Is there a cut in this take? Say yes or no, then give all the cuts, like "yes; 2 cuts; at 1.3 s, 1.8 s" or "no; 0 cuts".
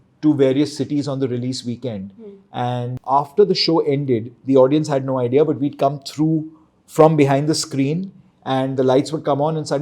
yes; 1 cut; at 2.9 s